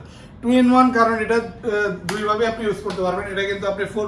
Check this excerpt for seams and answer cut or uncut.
uncut